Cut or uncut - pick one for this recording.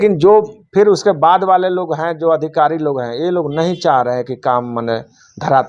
uncut